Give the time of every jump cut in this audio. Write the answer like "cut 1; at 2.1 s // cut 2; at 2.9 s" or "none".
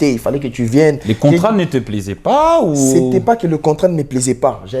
none